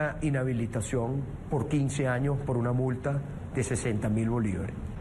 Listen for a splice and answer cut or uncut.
cut